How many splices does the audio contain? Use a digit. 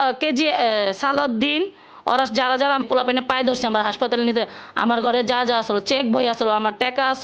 1